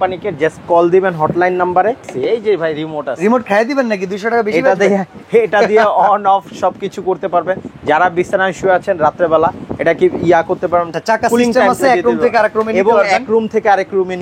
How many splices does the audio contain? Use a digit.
2